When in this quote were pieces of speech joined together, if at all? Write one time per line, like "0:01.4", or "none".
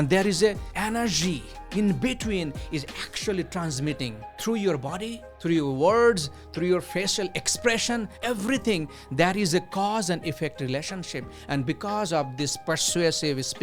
0:08.1